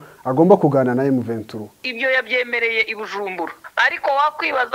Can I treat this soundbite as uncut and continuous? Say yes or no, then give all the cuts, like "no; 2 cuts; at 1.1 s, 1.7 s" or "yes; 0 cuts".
no; 2 cuts; at 1.9 s, 3.6 s